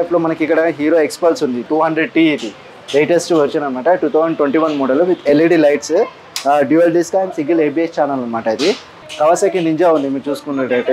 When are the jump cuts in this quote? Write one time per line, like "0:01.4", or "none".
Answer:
0:08.9

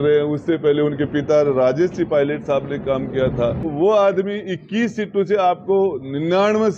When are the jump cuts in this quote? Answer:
0:03.7

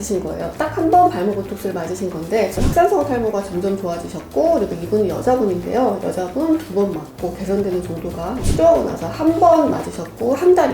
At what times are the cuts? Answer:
0:02.6
0:08.5

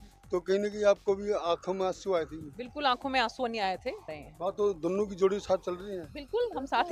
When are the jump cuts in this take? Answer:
0:04.1

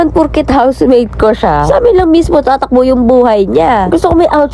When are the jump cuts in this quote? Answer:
none

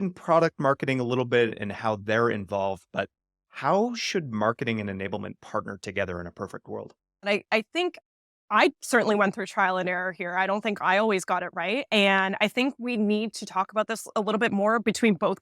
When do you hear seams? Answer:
0:01.5
0:07.3

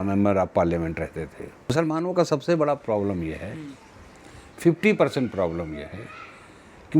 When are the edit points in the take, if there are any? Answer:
0:01.7

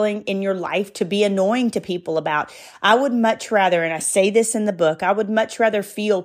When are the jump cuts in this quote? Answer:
none

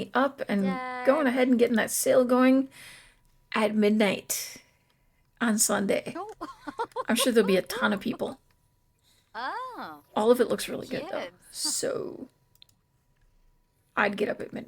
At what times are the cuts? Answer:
none

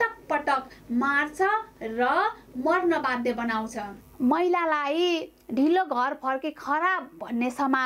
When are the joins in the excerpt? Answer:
0:03.9

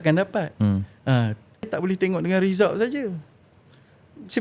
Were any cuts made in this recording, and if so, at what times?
0:01.7

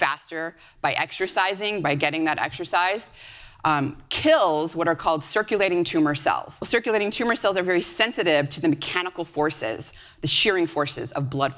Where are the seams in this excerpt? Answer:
0:06.6

